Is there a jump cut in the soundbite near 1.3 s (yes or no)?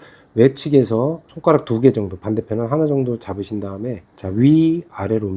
yes